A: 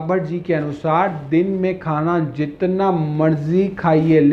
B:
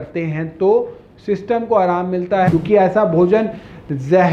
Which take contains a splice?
B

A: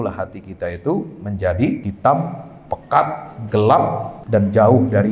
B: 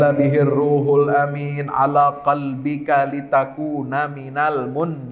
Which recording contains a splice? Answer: A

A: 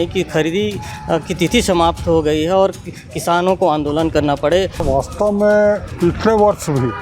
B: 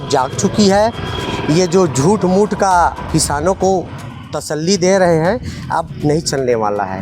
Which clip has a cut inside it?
A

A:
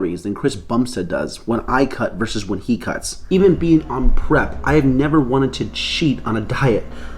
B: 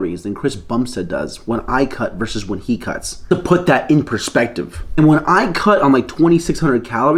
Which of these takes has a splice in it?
A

